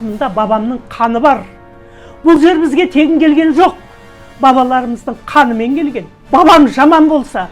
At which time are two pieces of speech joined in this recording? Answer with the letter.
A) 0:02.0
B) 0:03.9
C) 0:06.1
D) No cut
C